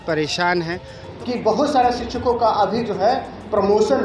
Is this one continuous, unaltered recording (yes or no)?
no